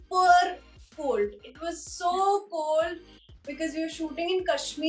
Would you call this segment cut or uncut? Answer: uncut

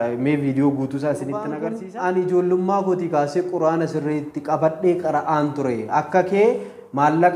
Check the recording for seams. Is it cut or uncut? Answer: cut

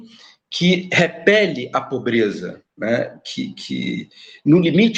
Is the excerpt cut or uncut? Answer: uncut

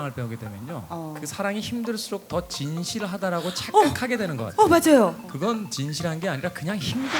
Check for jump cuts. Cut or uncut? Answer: cut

